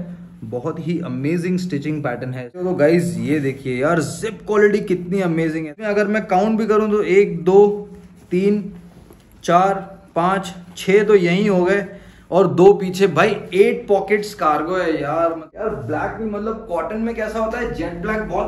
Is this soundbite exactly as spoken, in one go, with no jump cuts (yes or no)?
no